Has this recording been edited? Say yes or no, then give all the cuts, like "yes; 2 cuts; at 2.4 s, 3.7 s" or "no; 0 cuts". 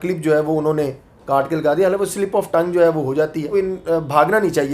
yes; 1 cut; at 3.5 s